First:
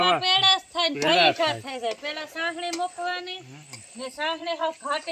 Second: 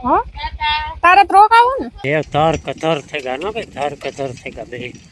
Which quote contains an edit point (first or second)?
second